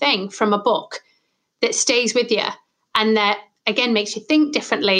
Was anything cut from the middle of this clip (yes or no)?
no